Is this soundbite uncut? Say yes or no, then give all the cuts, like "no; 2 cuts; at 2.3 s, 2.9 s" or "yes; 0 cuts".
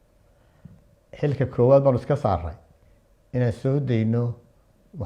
yes; 0 cuts